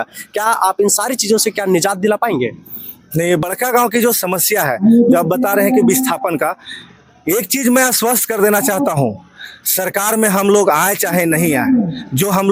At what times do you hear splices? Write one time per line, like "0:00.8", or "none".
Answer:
0:03.4